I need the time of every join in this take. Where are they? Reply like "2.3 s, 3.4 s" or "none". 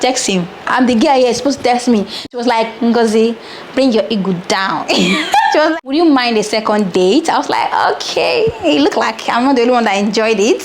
2.3 s, 5.8 s